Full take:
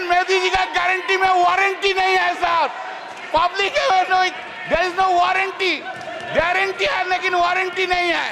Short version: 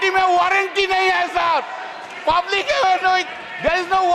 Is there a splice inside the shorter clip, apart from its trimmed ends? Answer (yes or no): no